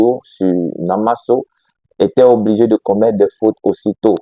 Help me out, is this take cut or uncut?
uncut